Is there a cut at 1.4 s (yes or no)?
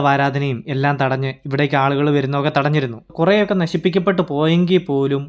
no